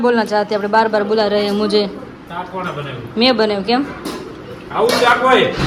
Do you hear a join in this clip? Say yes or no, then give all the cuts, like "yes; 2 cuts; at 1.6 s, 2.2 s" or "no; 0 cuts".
no; 0 cuts